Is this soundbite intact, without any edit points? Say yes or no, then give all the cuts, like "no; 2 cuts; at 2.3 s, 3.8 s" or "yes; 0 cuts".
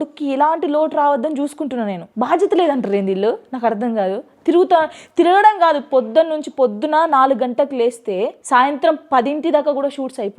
no; 1 cut; at 2.0 s